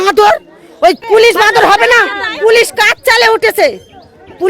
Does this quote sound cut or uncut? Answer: cut